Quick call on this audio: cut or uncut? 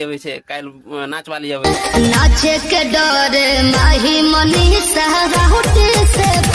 uncut